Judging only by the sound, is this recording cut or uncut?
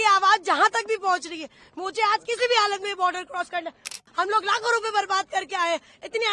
cut